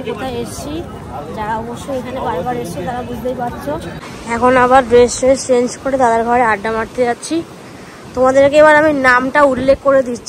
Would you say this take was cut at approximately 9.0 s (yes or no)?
no